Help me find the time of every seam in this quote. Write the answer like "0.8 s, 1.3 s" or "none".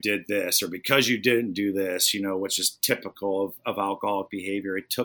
none